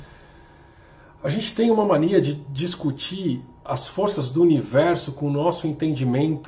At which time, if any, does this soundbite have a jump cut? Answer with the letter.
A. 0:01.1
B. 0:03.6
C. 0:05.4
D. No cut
D